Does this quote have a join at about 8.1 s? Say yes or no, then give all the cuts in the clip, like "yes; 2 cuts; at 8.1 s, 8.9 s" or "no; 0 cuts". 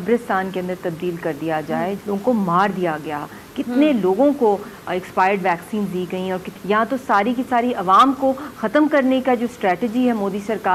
no; 2 cuts; at 2.0 s, 6.5 s